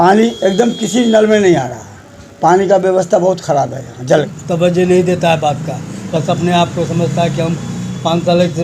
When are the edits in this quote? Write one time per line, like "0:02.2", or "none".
0:04.4